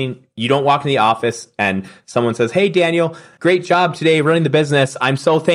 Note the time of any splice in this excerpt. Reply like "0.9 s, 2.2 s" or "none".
3.2 s